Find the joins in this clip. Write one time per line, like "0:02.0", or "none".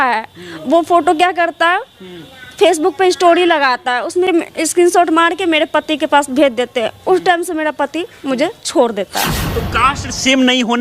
0:04.3
0:09.4